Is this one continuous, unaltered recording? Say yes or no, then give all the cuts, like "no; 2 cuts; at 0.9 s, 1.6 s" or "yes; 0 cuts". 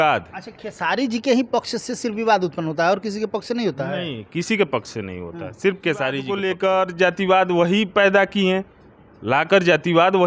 no; 1 cut; at 6.4 s